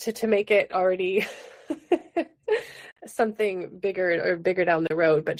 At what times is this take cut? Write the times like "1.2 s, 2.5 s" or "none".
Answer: none